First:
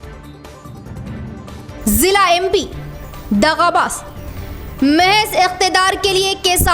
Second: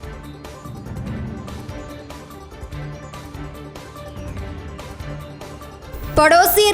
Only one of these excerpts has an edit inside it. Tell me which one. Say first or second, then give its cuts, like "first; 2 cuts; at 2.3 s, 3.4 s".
first; 1 cut; at 1.8 s